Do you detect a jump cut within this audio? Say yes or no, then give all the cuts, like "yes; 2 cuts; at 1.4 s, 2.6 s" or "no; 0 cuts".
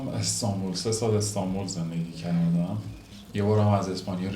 yes; 1 cut; at 3.1 s